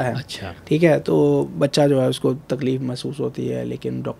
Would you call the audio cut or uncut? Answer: uncut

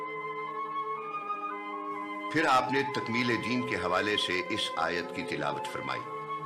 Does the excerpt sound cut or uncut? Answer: uncut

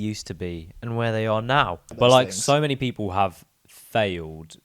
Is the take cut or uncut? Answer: cut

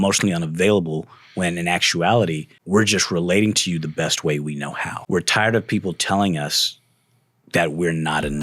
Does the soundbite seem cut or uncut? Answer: cut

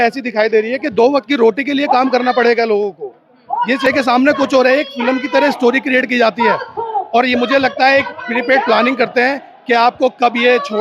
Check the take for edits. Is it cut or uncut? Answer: uncut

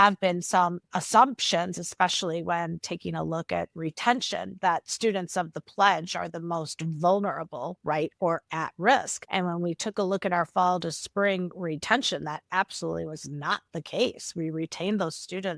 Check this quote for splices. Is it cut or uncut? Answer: cut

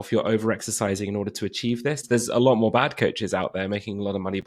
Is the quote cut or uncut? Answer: cut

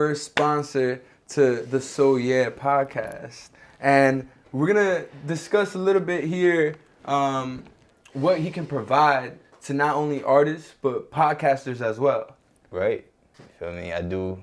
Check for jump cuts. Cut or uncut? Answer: uncut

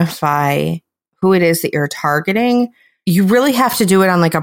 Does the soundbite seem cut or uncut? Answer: cut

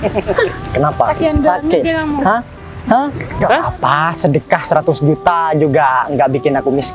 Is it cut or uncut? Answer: cut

